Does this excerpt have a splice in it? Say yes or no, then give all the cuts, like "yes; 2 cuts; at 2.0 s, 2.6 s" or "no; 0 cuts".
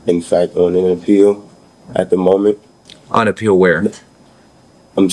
no; 0 cuts